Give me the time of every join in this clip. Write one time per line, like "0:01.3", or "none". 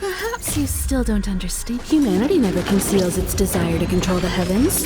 0:01.8